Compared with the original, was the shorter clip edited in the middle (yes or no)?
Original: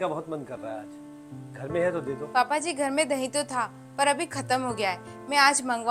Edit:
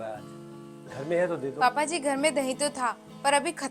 yes